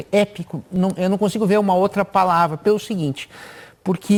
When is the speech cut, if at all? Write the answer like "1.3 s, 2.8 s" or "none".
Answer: none